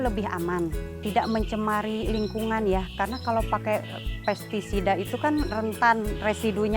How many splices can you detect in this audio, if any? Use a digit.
1